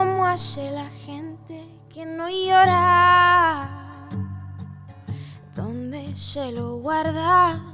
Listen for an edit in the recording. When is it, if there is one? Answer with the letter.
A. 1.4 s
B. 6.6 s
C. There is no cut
C